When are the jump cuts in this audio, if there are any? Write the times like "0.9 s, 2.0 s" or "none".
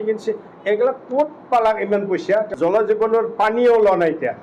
2.5 s